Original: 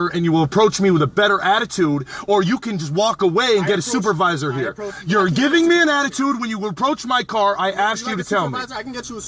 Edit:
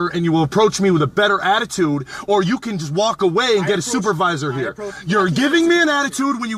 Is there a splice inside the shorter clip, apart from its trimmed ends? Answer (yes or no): no